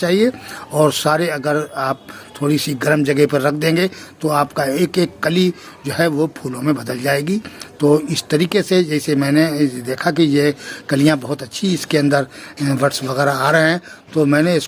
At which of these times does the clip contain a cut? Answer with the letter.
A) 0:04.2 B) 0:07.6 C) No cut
C